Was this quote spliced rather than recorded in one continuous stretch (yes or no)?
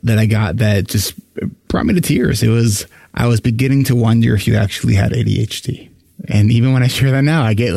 no